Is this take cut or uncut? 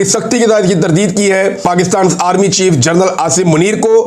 cut